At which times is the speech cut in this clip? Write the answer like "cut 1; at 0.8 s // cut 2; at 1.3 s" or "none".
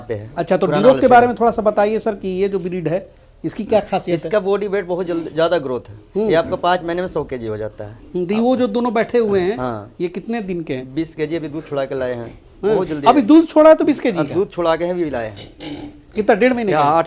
none